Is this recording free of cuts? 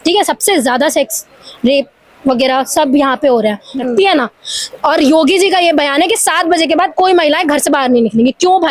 no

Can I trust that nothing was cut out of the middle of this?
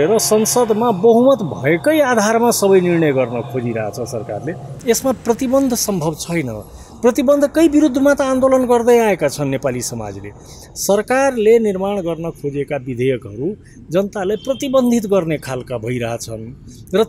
no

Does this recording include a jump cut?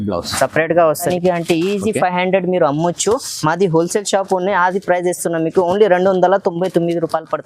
yes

